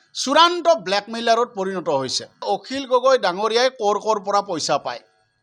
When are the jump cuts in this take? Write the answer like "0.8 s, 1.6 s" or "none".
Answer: 2.5 s